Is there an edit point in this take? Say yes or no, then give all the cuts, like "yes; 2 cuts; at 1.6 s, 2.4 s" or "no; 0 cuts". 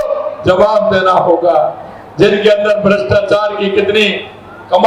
no; 0 cuts